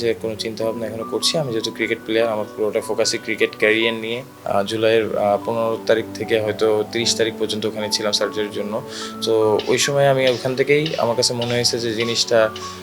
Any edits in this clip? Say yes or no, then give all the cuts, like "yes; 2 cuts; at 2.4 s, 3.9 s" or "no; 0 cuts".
yes; 1 cut; at 4.3 s